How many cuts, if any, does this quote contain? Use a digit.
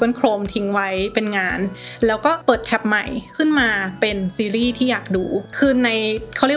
2